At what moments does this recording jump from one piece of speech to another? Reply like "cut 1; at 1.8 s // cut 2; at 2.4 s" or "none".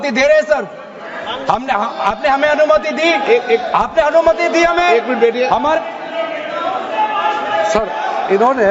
none